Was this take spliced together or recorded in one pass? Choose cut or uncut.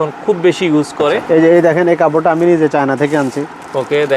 cut